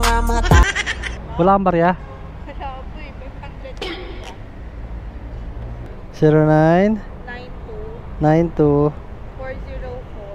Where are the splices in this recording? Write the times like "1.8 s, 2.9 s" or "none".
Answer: 5.8 s